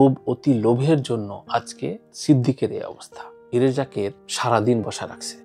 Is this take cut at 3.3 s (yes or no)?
yes